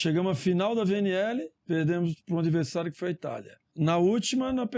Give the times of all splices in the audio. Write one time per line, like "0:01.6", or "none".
0:01.5
0:03.6